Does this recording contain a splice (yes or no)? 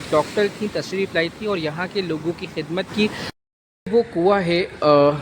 yes